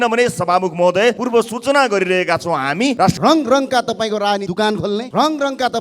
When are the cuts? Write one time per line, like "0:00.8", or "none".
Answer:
0:01.2
0:03.0
0:04.7